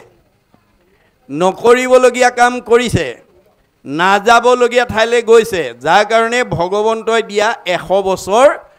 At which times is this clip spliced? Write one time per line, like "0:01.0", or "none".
none

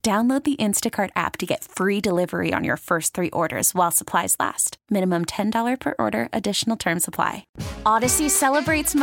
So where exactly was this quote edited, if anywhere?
0:07.5

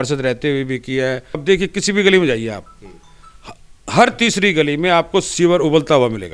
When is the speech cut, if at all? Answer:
0:01.4

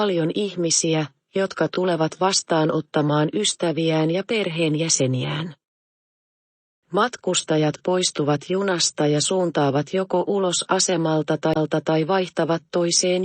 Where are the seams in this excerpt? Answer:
0:12.1

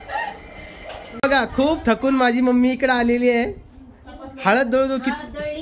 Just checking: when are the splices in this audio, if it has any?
0:01.2

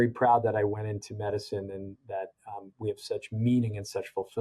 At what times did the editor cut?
none

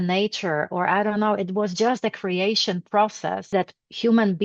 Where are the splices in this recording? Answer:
0:03.5

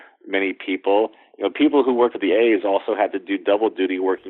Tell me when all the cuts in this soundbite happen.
0:02.2

